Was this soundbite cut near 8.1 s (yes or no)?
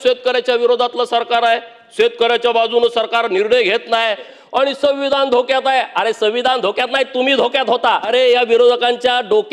yes